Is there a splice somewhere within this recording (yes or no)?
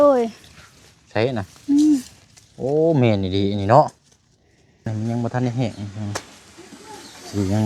yes